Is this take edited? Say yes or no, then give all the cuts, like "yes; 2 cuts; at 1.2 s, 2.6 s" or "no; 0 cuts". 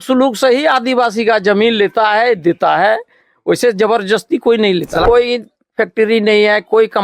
yes; 1 cut; at 5.0 s